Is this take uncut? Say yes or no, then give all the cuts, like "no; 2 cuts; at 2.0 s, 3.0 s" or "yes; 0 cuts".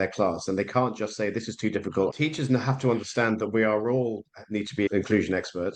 no; 2 cuts; at 2.1 s, 4.9 s